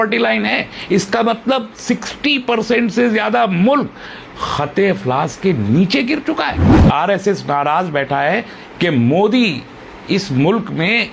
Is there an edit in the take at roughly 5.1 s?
no; 1 cut; at 6.6 s

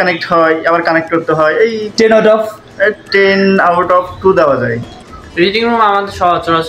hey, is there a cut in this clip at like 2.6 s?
no; 1 cut; at 4.9 s

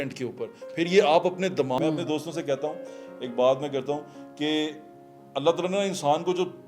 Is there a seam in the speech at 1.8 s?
yes; 1 cut; at 1.8 s

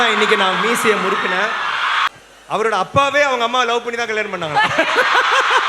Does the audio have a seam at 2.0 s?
yes; 1 cut; at 2.0 s

